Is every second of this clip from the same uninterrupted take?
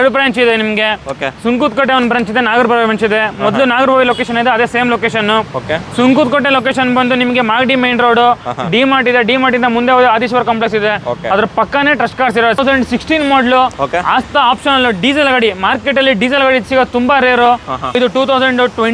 no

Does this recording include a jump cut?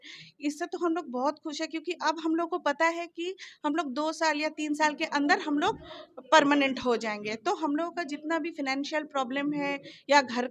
no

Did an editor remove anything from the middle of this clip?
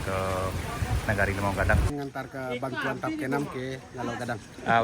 yes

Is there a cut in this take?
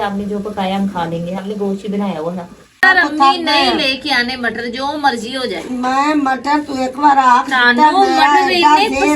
yes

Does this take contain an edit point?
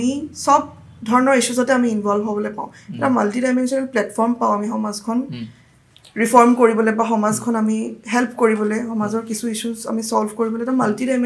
no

